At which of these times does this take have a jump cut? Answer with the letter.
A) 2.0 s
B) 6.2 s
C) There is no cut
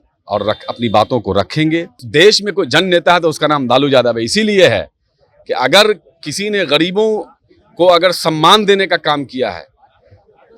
A